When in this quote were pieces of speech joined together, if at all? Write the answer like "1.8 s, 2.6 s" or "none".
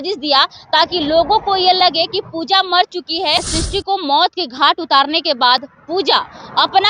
3.4 s